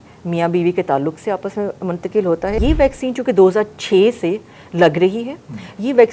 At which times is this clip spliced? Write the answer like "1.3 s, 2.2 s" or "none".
2.6 s